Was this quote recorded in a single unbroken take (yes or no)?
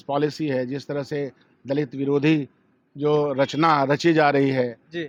yes